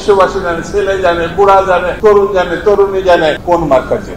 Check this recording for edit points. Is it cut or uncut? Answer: cut